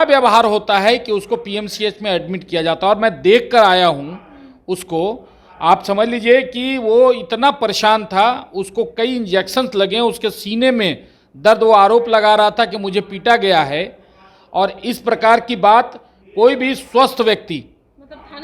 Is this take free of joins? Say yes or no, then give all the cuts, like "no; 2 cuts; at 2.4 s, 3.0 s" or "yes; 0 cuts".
yes; 0 cuts